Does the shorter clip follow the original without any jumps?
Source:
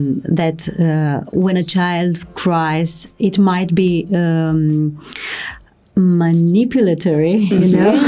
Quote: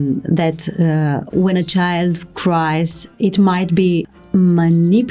no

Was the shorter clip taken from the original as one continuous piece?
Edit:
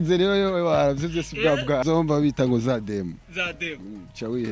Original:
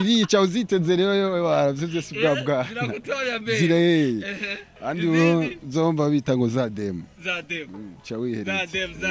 no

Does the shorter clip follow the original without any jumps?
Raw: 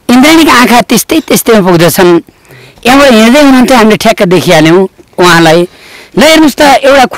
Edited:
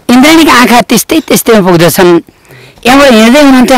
yes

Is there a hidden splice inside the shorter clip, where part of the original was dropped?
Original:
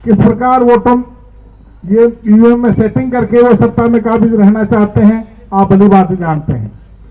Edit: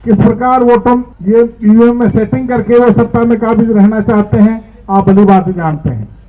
yes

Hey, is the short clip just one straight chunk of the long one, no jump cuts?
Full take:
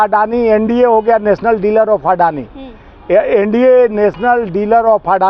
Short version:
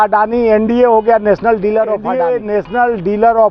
no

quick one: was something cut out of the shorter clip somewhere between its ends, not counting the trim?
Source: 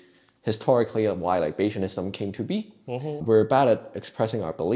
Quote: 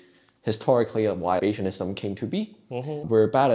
yes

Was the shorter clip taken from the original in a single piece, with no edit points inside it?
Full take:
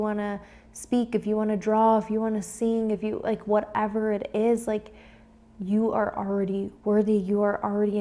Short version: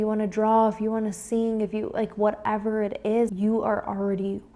no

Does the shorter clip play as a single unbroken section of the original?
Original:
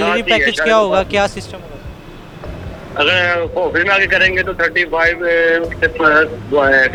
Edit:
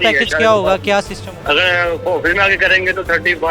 no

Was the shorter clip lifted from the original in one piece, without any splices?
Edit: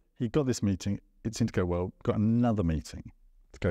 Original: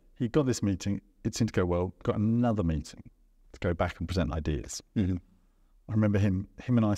yes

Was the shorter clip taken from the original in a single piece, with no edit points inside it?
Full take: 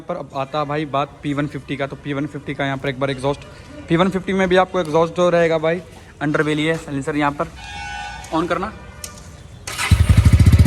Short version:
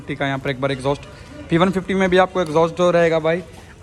yes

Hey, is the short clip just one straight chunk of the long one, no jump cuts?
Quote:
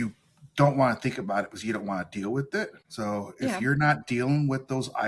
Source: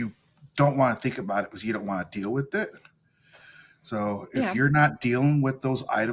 no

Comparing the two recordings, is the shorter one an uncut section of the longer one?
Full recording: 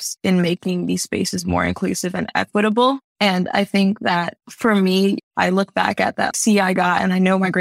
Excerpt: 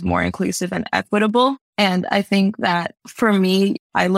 yes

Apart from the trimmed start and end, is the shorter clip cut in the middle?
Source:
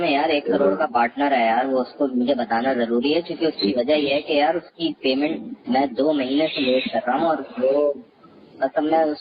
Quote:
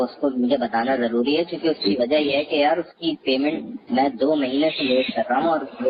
no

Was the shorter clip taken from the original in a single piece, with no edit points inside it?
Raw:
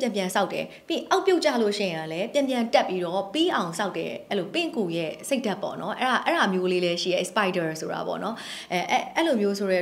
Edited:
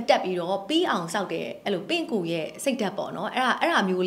yes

